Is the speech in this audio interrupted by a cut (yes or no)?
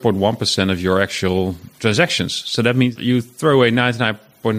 yes